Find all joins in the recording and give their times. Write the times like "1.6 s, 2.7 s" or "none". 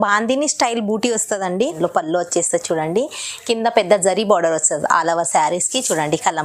1.8 s